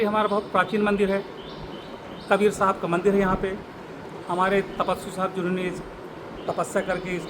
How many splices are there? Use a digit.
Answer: 0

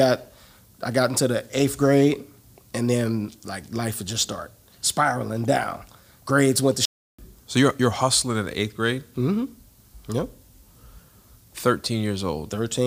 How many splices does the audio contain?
0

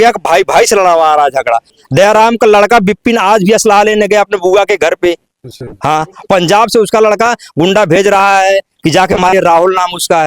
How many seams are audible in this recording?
1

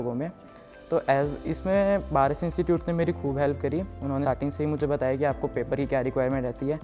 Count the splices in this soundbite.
1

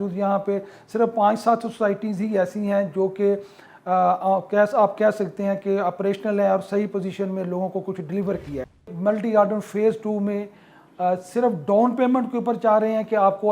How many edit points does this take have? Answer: 1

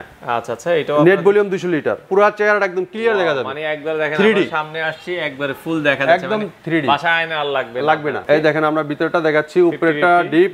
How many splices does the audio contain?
2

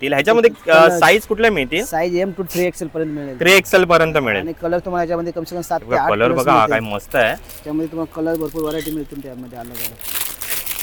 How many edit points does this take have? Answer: 0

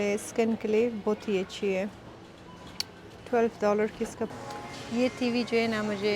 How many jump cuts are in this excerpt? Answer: 1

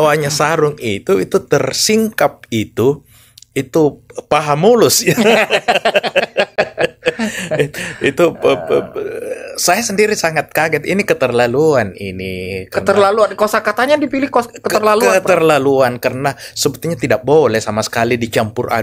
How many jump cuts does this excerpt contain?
0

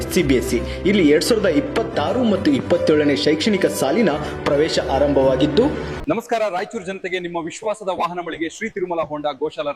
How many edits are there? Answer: 1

